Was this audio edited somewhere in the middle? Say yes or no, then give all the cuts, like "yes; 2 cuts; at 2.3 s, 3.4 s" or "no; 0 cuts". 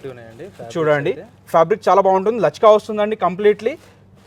no; 0 cuts